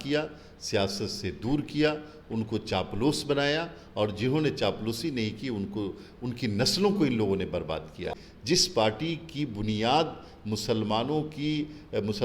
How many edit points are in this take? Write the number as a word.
one